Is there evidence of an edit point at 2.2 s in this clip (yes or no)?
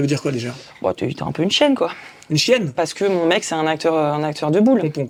no